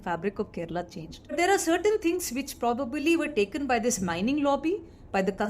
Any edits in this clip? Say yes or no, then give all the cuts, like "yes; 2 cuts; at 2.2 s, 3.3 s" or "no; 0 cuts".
yes; 1 cut; at 1.3 s